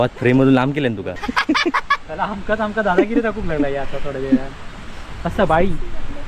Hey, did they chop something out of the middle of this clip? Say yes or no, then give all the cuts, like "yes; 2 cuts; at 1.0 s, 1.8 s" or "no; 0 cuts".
yes; 1 cut; at 1.2 s